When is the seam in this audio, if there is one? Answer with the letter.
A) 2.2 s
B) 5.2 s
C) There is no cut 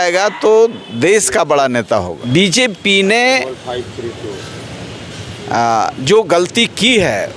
A